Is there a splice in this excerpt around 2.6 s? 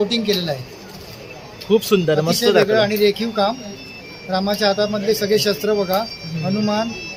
no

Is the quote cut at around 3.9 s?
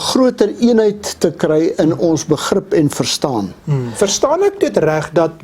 yes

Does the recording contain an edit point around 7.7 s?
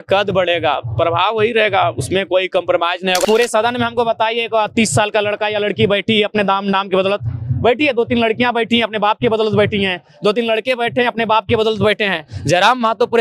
no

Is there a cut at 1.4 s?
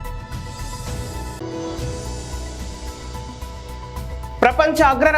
yes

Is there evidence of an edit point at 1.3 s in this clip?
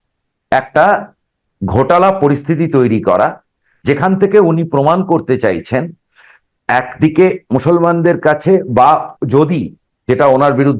no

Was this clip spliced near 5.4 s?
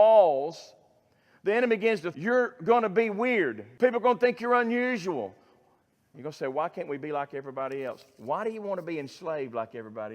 no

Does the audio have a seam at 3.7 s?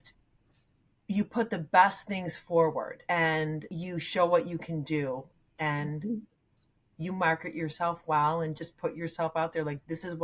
yes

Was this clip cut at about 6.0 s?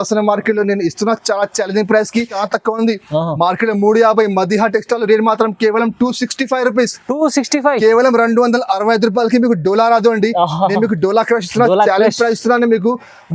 no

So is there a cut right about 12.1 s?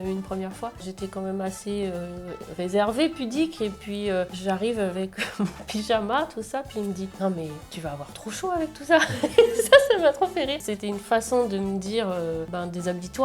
no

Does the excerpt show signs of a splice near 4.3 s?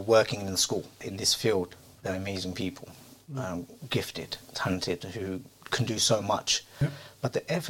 no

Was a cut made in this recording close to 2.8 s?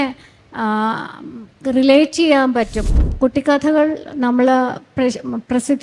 yes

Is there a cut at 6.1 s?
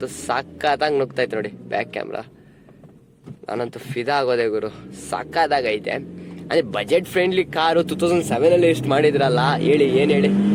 no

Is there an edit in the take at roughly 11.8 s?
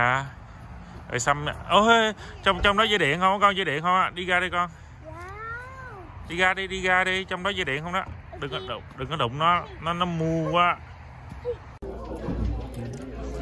yes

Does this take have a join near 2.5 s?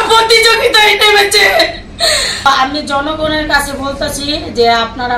yes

